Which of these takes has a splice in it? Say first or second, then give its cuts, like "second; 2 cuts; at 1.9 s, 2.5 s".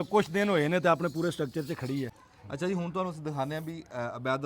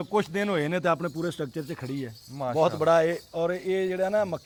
first; 1 cut; at 2.2 s